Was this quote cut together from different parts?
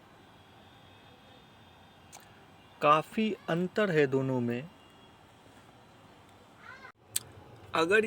yes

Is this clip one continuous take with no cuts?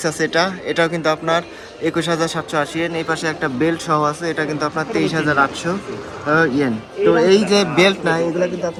yes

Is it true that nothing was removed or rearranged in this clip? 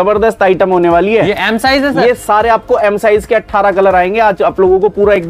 yes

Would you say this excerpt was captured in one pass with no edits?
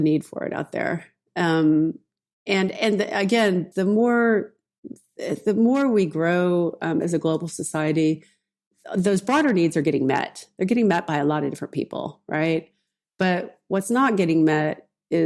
yes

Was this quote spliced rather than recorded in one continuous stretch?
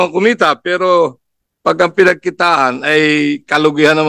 no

